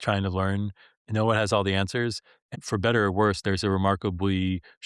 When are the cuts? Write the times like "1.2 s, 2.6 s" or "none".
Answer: 2.6 s